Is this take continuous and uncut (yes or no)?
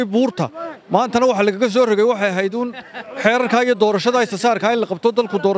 yes